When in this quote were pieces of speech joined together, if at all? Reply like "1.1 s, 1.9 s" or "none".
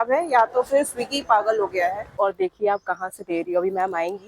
2.2 s